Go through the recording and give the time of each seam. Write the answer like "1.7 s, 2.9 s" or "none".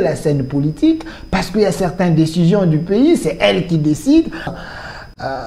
4.5 s